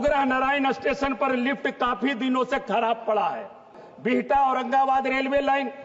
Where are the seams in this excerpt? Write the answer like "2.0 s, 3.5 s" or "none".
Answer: 3.9 s